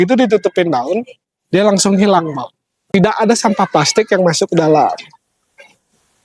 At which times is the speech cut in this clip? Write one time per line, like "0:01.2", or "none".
0:02.9